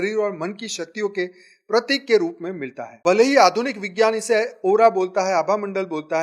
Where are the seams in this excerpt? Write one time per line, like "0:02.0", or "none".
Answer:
0:03.0